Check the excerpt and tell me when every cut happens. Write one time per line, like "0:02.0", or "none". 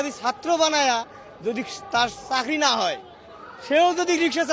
none